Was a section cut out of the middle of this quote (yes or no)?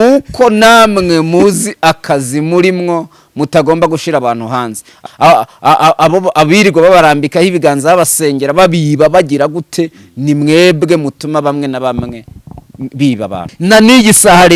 yes